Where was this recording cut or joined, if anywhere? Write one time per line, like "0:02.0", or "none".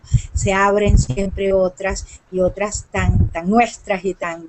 none